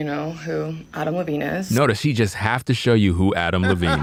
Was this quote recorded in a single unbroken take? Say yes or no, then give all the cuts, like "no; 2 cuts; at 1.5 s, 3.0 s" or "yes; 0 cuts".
yes; 0 cuts